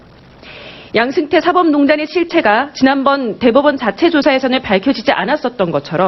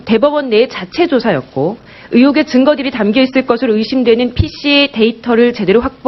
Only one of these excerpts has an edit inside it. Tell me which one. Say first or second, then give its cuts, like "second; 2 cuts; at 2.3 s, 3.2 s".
second; 1 cut; at 1.4 s